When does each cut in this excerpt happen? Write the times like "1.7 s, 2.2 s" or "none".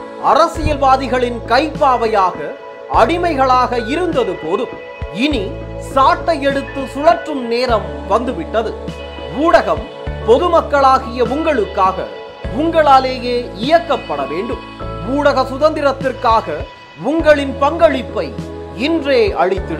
none